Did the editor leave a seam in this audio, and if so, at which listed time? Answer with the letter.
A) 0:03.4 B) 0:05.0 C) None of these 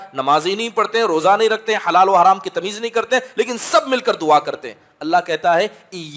C